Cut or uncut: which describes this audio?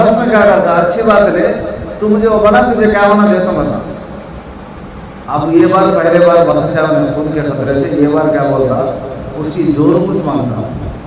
uncut